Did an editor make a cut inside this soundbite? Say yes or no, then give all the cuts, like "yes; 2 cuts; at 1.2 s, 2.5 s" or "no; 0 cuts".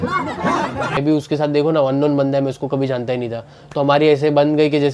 yes; 1 cut; at 0.9 s